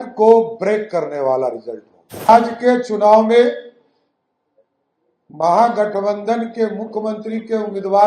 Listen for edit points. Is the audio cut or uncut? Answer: cut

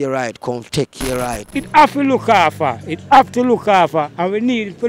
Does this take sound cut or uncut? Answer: cut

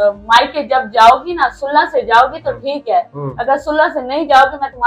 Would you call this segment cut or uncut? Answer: uncut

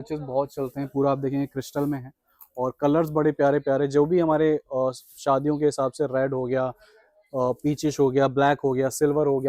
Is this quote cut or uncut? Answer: uncut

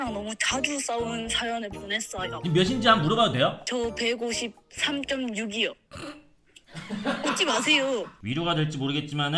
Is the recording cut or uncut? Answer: cut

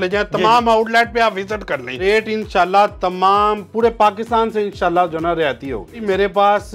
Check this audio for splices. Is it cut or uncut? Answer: cut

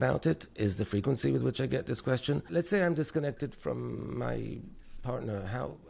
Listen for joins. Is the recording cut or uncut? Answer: cut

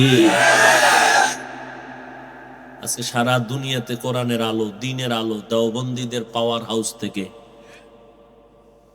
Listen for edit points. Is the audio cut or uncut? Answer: cut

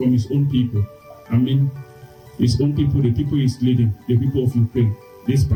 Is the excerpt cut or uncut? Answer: uncut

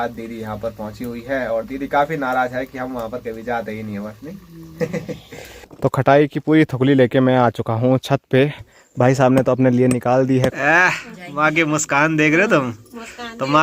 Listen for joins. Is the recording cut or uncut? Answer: cut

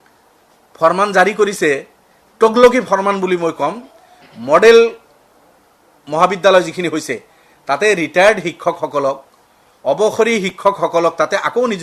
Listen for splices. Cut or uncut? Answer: uncut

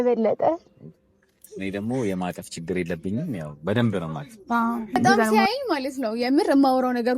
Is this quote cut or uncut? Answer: cut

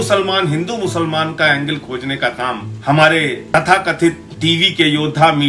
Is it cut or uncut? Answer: cut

